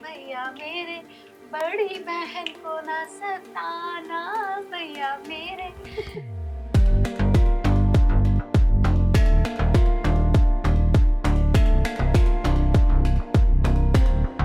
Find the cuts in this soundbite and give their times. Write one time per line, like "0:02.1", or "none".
none